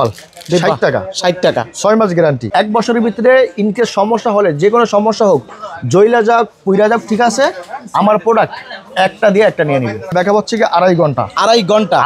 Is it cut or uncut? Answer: cut